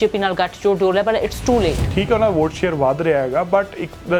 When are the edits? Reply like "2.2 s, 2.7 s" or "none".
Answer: 1.9 s